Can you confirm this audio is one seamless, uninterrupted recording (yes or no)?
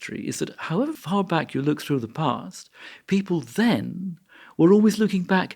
no